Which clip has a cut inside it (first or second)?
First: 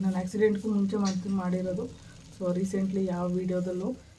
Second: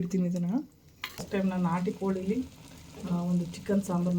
second